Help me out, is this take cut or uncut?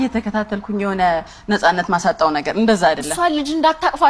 uncut